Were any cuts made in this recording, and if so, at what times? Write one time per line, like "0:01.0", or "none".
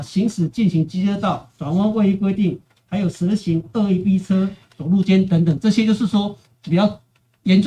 none